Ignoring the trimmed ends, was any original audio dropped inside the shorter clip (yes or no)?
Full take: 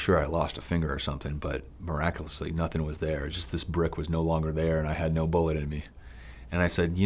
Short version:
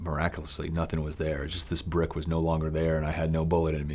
no